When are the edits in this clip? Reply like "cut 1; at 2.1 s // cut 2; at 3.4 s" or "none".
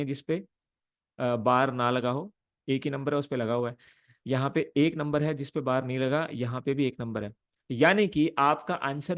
none